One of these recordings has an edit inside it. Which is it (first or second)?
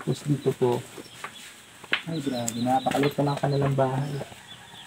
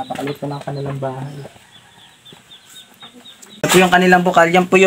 second